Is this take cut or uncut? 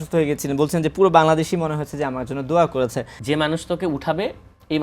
cut